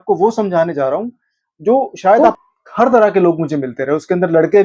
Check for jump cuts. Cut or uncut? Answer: cut